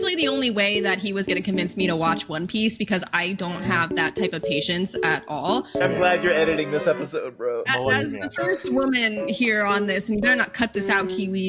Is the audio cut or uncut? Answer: cut